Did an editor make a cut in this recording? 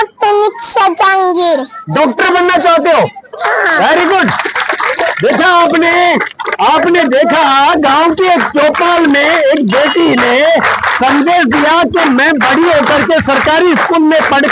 no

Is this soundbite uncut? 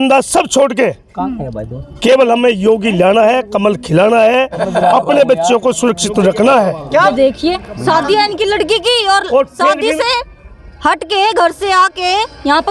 no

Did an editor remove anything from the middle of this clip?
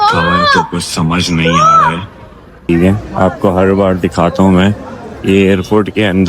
yes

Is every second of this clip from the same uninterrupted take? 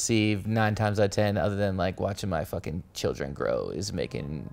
yes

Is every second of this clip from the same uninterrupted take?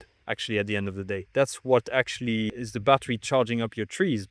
no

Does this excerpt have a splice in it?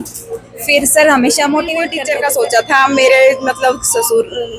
yes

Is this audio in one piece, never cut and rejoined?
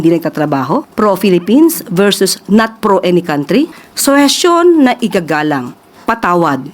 no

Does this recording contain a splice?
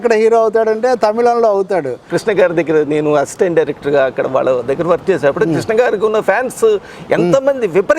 yes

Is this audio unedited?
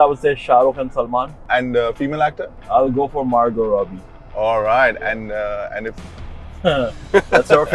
no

